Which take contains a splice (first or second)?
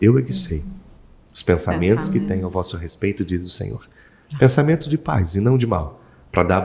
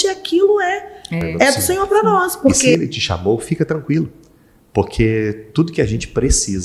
second